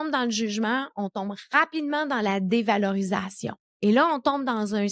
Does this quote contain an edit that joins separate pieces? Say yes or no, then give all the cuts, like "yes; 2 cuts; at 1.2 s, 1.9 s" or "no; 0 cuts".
no; 0 cuts